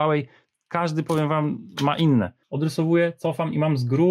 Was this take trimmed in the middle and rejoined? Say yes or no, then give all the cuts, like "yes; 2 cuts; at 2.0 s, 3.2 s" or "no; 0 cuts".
yes; 1 cut; at 2.4 s